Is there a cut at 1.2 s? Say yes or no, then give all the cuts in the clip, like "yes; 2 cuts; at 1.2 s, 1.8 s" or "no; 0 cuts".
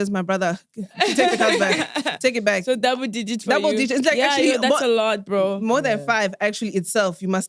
no; 0 cuts